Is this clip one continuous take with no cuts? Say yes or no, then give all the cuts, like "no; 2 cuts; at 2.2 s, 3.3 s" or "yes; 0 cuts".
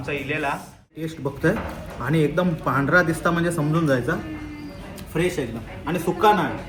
no; 1 cut; at 1.0 s